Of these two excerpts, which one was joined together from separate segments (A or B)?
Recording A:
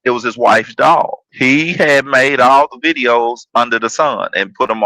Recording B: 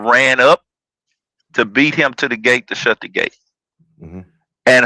A